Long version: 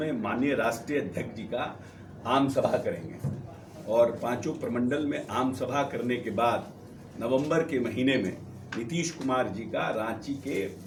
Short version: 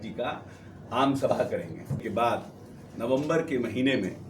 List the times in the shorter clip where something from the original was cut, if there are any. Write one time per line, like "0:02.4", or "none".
0:02.0

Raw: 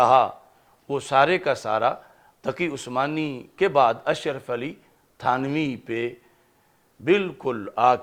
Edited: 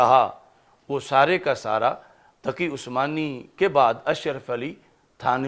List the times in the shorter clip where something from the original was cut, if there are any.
none

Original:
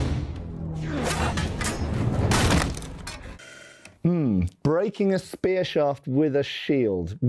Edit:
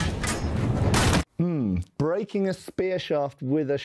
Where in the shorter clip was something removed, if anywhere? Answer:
0:01.2

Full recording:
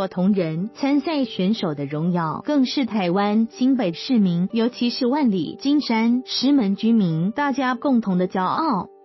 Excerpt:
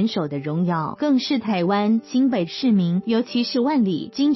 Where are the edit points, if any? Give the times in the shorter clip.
none

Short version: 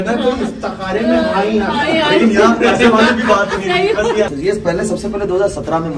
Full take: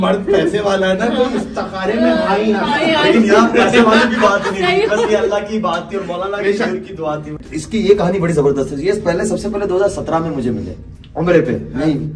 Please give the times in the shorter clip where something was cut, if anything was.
0:04.3

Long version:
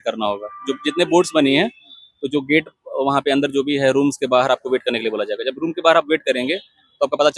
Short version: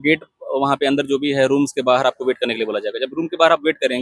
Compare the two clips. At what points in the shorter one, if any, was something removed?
none

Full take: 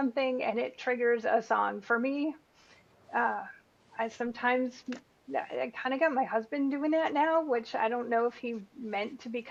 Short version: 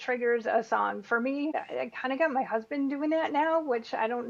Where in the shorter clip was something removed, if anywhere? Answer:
0:01.5

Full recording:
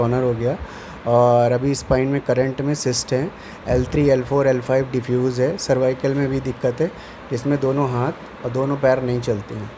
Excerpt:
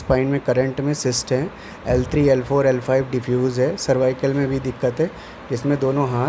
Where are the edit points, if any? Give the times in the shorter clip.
none

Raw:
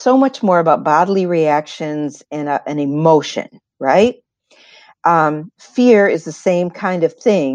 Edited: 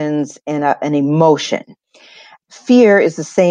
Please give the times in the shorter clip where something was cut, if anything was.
0:02.1

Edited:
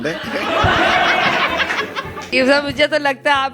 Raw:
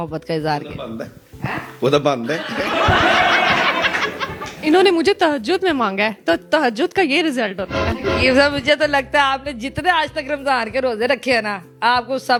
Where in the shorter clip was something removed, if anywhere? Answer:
0:02.3

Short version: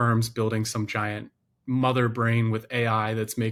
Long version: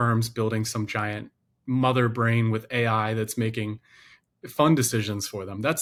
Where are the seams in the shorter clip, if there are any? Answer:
none

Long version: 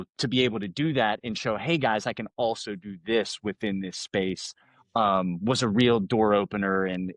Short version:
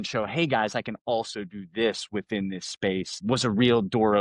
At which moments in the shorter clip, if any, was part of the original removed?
0:03.2

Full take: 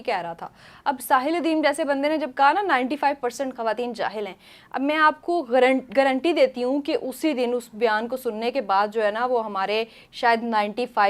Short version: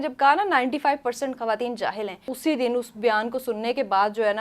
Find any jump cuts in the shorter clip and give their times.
0:02.3

